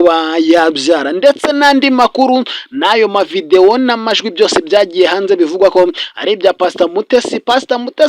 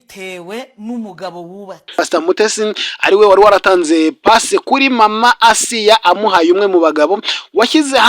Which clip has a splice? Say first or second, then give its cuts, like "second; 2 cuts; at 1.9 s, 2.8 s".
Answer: second; 1 cut; at 2.1 s